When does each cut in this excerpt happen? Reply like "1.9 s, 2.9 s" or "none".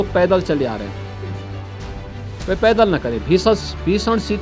0.9 s, 2.5 s